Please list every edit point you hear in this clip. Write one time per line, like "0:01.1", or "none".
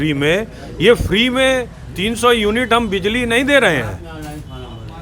none